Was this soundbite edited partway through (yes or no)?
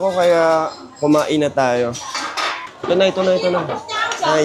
no